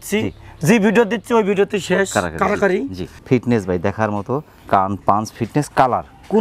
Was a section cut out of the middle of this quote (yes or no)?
yes